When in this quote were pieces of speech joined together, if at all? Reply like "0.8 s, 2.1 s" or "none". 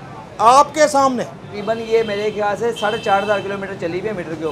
1.5 s